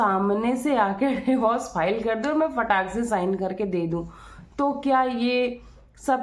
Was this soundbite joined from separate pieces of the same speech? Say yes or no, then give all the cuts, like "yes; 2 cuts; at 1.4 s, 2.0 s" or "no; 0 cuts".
no; 0 cuts